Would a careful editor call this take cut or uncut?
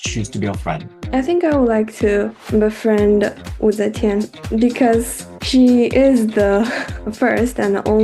cut